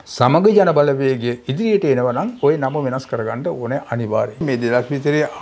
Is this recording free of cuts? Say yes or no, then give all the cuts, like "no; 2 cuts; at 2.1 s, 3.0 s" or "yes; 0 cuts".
no; 1 cut; at 4.3 s